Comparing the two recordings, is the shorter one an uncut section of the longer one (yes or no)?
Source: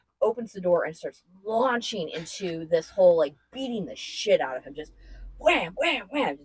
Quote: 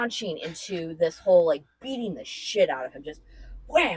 yes